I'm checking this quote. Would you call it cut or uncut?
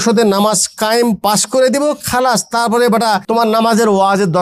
cut